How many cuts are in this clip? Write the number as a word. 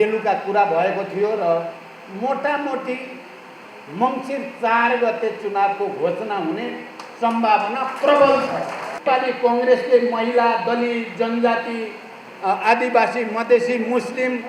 one